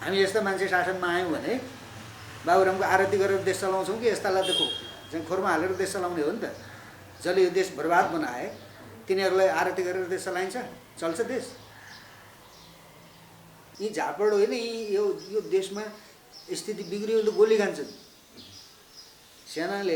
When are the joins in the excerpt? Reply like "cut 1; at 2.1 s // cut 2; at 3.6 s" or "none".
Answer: cut 1; at 13.6 s